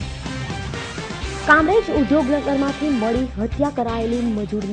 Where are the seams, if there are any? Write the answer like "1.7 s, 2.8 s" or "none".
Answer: 0.9 s

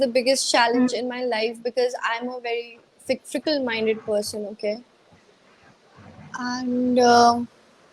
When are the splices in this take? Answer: none

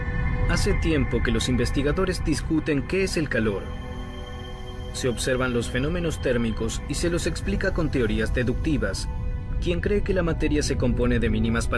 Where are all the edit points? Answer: 6.7 s

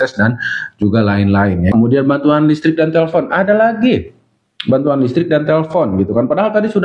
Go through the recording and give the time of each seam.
1.7 s

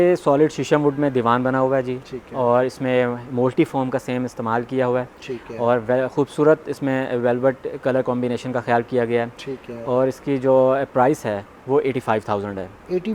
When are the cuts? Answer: none

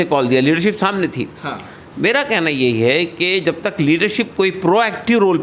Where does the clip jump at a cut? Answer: none

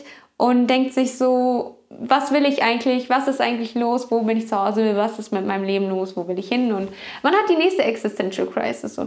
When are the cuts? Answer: none

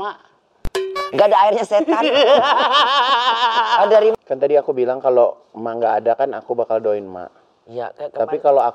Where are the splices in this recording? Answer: 4.2 s

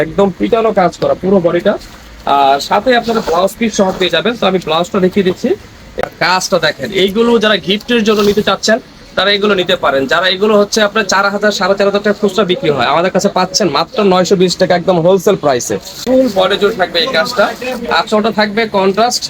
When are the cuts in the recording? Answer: 6.0 s, 16.0 s

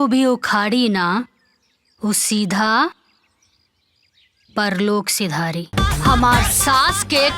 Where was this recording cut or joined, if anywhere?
5.7 s

